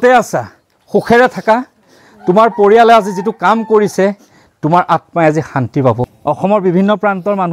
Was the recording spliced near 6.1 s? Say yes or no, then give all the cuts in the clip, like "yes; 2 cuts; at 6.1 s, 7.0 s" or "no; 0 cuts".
yes; 1 cut; at 6.1 s